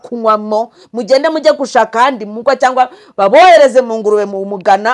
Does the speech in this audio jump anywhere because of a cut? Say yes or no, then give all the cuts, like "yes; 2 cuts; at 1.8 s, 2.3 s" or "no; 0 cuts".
no; 0 cuts